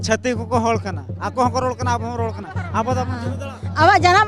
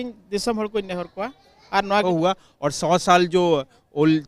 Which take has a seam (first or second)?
second